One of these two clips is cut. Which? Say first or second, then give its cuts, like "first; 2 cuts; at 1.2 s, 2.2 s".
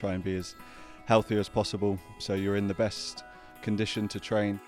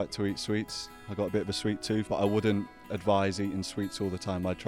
second; 1 cut; at 2.1 s